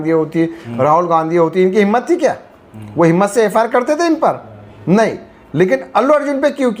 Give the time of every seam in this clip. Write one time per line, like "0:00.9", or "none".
none